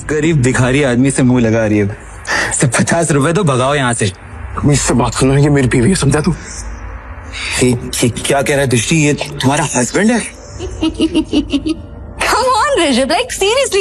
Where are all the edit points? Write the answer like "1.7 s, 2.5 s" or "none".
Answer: 10.7 s